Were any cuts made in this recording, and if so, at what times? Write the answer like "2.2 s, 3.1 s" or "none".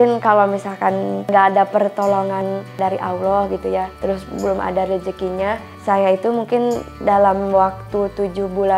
1.2 s